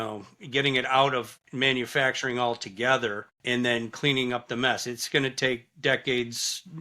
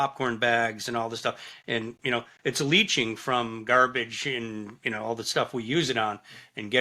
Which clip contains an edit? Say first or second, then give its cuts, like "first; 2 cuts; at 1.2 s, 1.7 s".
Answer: first; 2 cuts; at 1.4 s, 3.3 s